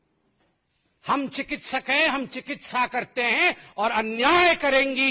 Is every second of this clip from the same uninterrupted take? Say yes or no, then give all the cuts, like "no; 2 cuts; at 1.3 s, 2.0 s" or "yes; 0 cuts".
yes; 0 cuts